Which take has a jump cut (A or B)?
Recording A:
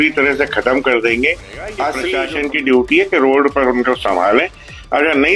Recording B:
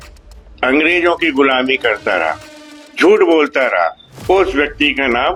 A